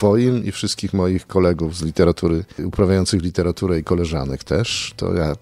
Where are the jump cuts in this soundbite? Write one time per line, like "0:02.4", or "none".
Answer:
0:02.6